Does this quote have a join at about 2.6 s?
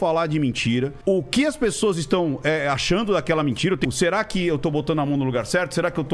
no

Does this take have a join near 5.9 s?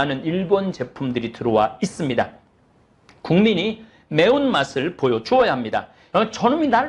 yes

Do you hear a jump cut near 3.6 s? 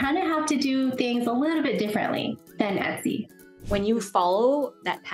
yes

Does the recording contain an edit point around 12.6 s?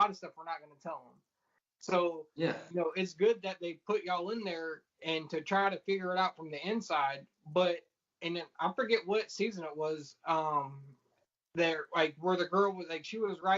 no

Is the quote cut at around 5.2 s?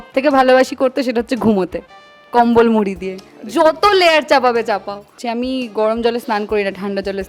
yes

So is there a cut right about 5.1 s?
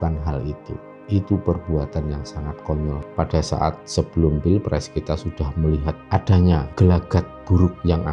no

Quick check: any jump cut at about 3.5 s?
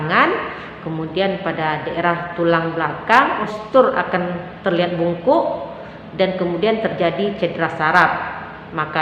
yes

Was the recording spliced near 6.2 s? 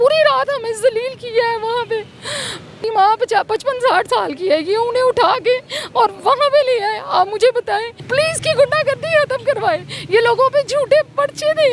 no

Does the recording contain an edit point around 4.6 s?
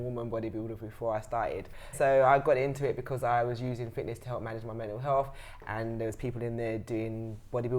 no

